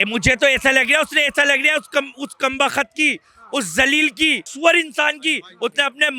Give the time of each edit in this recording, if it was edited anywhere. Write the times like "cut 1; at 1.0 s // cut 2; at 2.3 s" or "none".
cut 1; at 4.5 s